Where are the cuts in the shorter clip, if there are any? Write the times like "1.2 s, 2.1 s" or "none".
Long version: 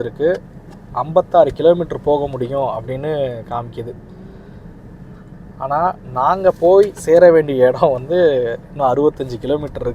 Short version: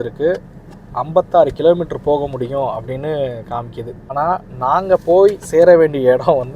4.0 s